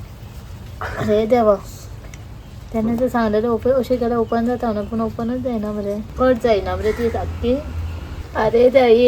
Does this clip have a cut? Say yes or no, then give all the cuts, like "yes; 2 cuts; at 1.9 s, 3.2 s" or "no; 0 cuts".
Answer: no; 0 cuts